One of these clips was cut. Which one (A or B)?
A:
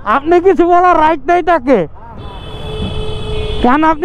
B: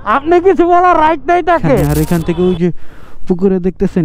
B